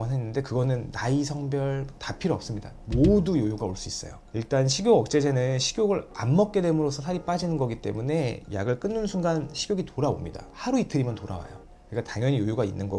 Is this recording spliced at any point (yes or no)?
no